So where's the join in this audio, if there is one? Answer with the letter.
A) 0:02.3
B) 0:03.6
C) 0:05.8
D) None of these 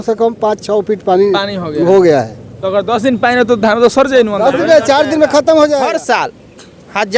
C